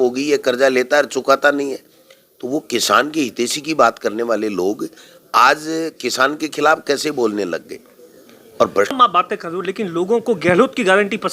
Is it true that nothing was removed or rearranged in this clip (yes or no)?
no